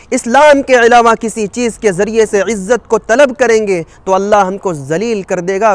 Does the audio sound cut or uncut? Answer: uncut